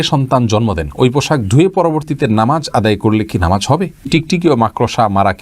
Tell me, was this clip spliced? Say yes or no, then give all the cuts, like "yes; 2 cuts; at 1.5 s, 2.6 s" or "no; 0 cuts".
yes; 1 cut; at 4.0 s